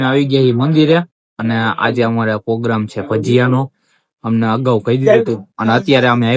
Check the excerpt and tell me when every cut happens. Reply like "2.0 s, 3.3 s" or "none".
none